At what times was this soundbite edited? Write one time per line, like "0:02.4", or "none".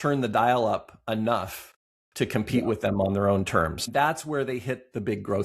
0:03.8

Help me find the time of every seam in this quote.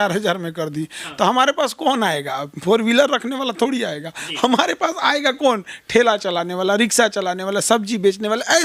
none

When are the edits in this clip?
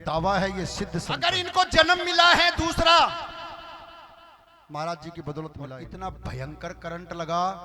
0:01.1
0:05.8

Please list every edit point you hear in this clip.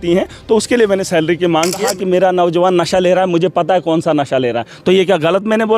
0:01.8

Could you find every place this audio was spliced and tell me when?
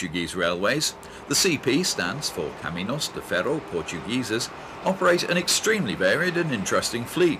none

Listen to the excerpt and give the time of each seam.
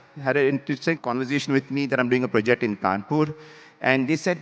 0:01.0

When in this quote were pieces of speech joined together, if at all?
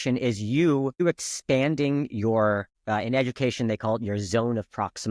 0:01.0
0:02.7

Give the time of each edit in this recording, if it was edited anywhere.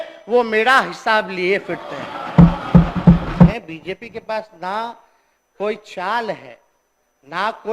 0:03.5

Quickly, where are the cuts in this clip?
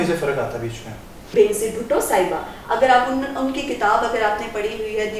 0:01.3

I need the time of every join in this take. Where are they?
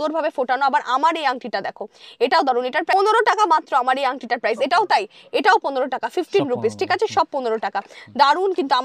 none

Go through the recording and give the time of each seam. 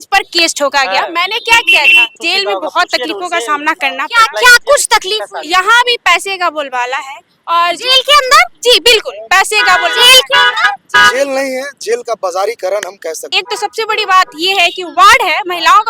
0:02.2
0:13.3

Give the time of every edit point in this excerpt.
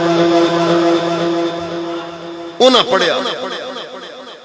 none

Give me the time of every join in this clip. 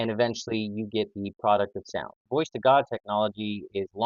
0:02.2

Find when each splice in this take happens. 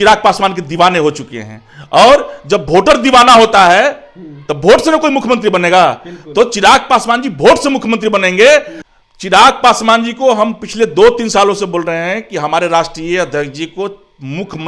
0:08.8

